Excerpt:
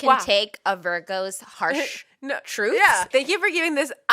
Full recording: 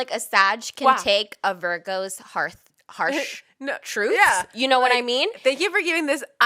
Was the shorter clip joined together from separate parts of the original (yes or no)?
yes